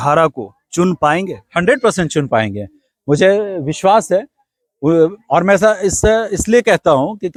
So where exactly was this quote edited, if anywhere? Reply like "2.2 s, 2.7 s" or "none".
none